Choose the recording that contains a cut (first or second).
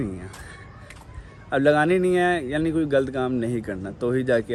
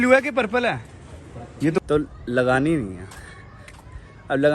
second